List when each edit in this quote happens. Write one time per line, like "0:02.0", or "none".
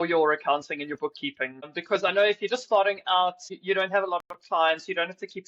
0:01.7
0:03.5